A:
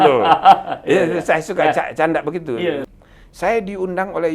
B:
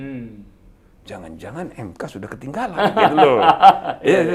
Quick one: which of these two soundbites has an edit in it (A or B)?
A